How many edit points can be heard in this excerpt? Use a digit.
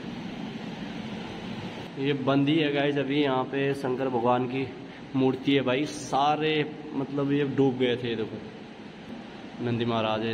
2